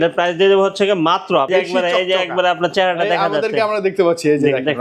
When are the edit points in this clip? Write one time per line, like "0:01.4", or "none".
0:01.5